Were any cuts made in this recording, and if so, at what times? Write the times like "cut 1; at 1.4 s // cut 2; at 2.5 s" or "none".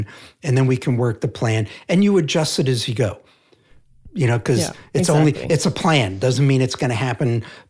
none